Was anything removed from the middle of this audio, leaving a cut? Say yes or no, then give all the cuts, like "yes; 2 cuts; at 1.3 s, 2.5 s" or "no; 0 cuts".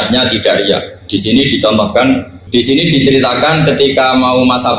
no; 0 cuts